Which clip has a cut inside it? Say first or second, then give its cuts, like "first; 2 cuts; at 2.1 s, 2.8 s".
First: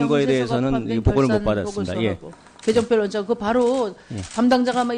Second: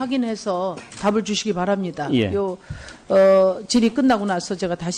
first; 1 cut; at 2.7 s